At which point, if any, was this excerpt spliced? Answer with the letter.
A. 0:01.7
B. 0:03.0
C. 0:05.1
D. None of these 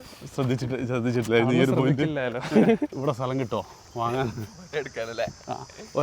B